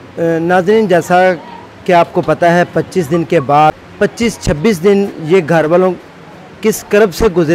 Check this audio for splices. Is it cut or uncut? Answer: cut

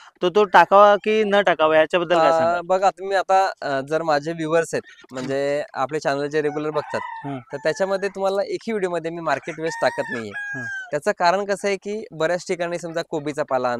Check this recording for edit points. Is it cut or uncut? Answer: uncut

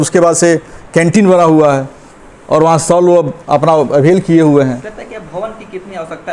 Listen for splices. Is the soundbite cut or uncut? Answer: uncut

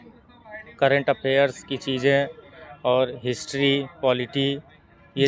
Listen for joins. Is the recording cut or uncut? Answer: uncut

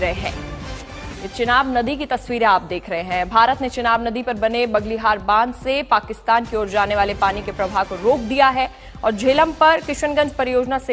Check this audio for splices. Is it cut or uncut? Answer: uncut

